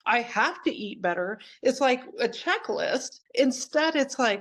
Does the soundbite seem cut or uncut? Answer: cut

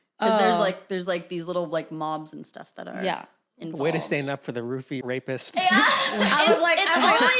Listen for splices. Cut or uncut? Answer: uncut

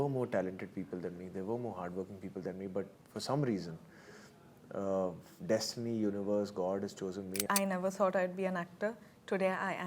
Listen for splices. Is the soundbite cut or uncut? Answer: cut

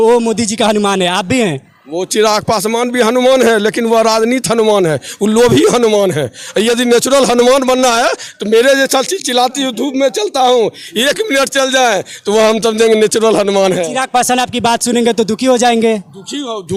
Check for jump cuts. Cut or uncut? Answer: uncut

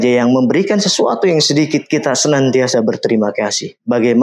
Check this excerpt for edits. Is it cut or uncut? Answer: uncut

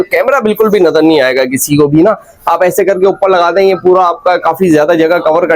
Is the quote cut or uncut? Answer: uncut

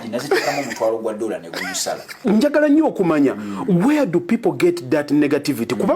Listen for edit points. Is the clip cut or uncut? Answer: cut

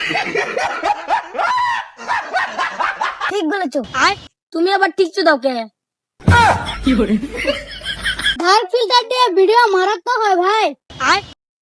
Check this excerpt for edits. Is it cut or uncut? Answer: uncut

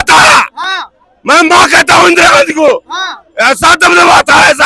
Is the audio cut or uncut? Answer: uncut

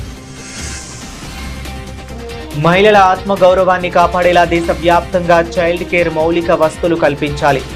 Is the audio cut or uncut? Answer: uncut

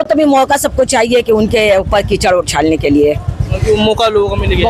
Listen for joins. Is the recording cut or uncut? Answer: uncut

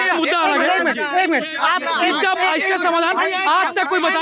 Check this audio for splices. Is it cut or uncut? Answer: uncut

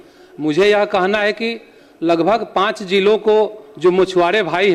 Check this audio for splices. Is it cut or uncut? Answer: uncut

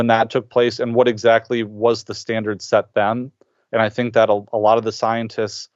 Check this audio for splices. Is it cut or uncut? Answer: uncut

